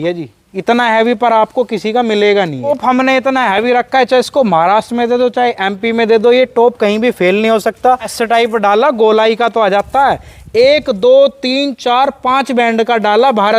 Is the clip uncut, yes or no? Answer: no